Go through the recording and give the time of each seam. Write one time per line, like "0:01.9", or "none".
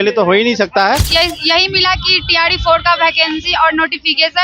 0:01.1